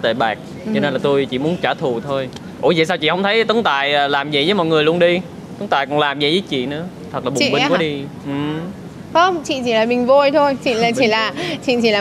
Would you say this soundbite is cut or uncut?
uncut